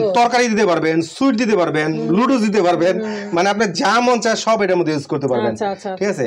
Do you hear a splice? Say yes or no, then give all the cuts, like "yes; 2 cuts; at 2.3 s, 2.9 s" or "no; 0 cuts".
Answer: no; 0 cuts